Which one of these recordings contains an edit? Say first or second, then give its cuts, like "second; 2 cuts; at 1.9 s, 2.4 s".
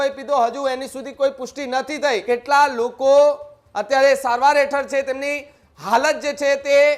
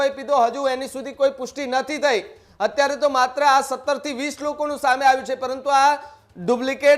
first; 1 cut; at 2.2 s